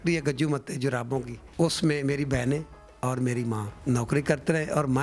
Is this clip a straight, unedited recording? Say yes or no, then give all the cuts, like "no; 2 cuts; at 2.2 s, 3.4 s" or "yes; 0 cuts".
no; 2 cuts; at 1.4 s, 3.7 s